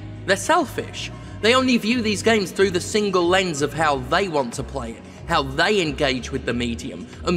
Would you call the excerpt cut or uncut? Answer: uncut